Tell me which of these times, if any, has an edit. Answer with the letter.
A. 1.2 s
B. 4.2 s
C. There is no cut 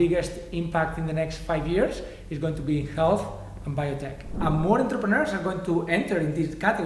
B